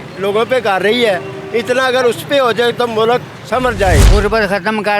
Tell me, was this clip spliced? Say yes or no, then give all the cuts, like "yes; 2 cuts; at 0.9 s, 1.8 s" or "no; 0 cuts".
yes; 1 cut; at 4.1 s